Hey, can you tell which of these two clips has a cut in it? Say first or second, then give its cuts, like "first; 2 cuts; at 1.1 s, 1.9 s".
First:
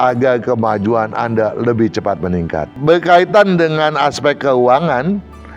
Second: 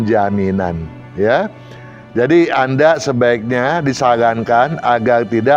first; 1 cut; at 2.7 s